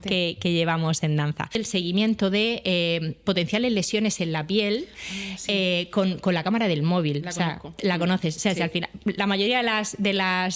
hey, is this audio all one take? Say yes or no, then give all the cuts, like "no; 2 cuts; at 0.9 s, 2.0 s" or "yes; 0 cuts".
no; 1 cut; at 1.6 s